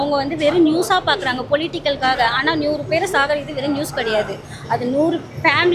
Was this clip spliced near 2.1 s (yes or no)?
no